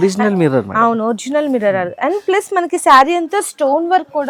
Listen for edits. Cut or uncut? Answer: uncut